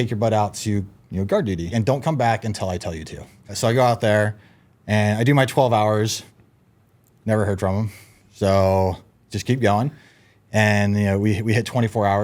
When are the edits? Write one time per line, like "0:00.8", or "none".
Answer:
0:01.7
0:03.5